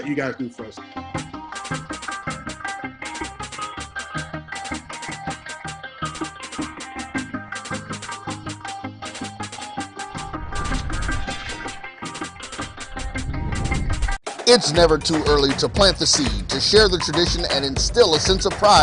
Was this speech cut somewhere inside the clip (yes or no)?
yes